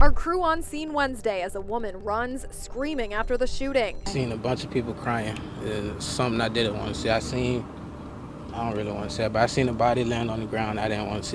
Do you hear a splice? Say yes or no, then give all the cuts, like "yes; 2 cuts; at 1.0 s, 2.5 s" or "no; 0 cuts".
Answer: no; 0 cuts